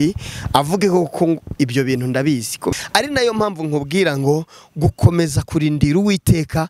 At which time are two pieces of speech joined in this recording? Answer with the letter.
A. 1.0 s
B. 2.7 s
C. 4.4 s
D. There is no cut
B